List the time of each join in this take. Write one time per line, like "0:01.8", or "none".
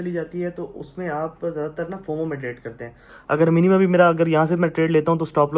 0:03.1